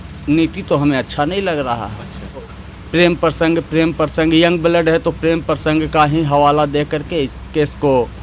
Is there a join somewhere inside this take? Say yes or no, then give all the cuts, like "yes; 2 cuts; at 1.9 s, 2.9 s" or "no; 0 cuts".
yes; 1 cut; at 2.5 s